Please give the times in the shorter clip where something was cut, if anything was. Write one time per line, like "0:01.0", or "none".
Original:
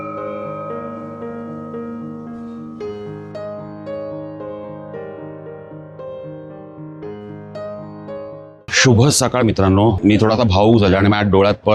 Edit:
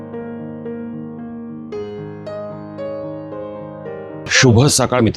0:04.3